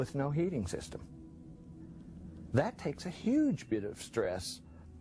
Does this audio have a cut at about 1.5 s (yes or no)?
no